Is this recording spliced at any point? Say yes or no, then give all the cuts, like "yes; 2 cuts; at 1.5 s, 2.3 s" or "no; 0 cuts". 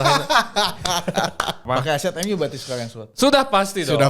yes; 1 cut; at 1.6 s